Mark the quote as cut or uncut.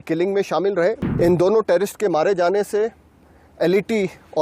cut